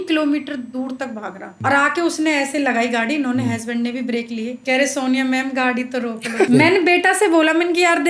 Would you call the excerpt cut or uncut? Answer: cut